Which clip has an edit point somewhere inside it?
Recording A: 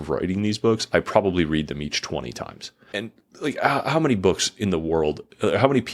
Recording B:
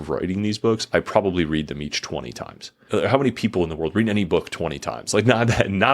B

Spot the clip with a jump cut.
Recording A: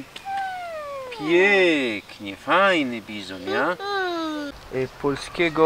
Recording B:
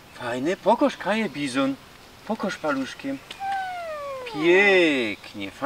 A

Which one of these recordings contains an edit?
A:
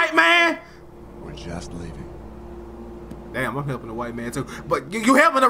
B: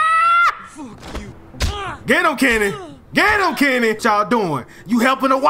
B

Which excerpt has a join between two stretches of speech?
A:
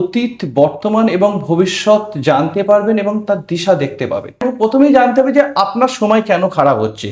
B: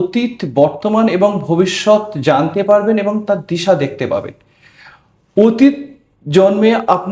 A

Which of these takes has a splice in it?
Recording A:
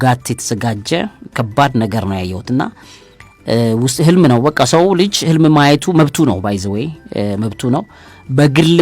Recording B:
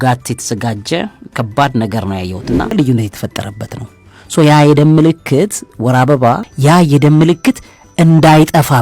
B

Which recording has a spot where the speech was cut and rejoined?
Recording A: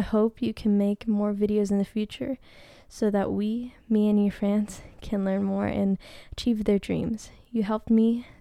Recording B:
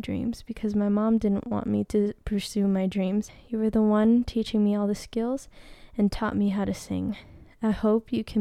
B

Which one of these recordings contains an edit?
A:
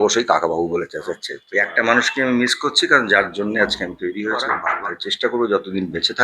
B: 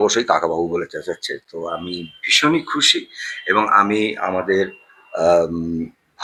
A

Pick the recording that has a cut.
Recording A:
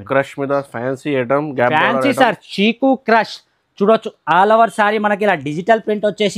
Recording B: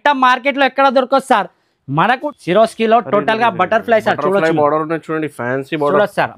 B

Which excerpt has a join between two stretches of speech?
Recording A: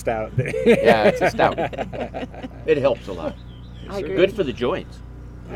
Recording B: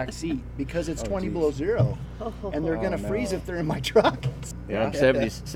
B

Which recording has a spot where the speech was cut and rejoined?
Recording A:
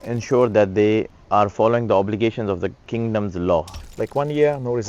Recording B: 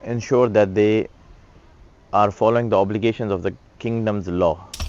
A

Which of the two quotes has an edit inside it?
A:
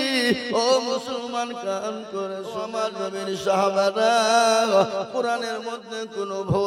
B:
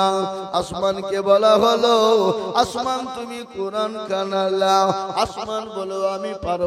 A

